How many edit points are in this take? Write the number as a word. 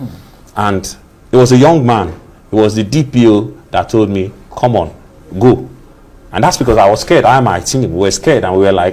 zero